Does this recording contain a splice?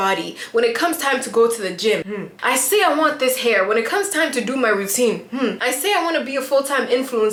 no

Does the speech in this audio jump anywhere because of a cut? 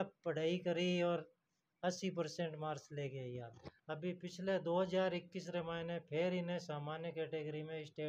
yes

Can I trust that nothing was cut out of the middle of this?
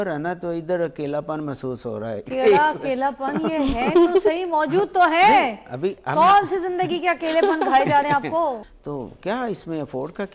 no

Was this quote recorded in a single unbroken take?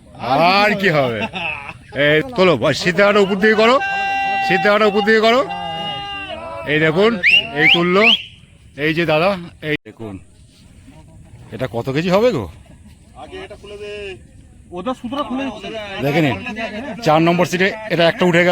no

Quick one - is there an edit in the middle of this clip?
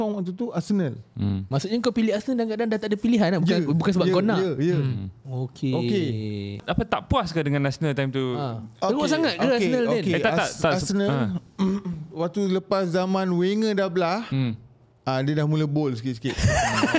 yes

